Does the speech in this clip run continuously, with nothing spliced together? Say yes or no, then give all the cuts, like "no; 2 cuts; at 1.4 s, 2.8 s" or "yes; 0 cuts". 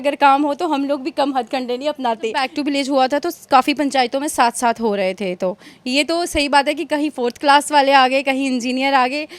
no; 1 cut; at 2.4 s